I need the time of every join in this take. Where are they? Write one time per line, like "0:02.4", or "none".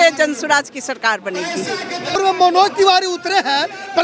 0:02.1